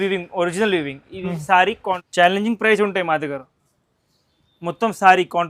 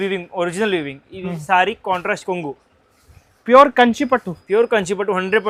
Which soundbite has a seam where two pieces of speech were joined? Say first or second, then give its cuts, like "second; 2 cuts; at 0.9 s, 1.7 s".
first; 1 cut; at 2.0 s